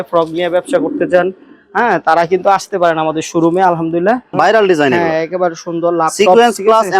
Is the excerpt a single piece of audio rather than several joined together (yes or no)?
no